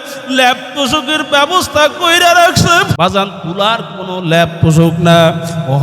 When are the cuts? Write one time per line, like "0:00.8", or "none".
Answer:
0:02.9